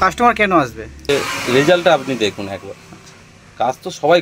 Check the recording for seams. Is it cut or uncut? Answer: cut